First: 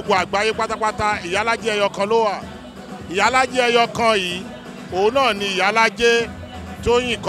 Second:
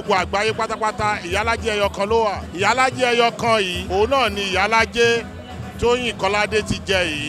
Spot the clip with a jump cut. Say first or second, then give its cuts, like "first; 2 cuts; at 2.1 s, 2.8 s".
second; 2 cuts; at 2.5 s, 3.8 s